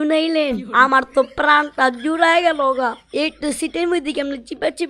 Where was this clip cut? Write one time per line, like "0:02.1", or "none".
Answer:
none